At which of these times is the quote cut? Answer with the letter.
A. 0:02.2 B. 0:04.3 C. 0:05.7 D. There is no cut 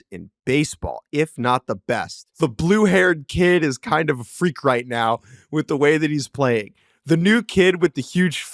A